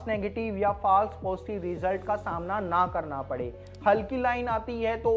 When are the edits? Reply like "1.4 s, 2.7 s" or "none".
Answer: none